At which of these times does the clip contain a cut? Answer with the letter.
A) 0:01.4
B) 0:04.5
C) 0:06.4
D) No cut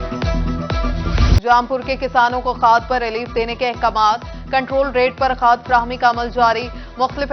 A